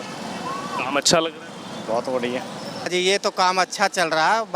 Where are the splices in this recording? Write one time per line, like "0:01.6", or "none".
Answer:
0:02.9